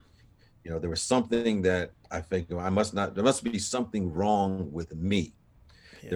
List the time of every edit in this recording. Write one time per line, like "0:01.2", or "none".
none

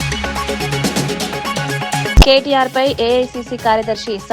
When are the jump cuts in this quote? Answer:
0:02.1

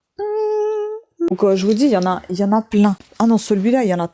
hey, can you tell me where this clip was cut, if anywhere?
0:01.3
0:03.0

